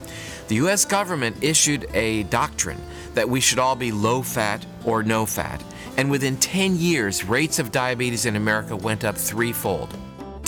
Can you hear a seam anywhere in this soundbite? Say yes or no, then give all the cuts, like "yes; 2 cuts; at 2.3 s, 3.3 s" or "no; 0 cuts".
no; 0 cuts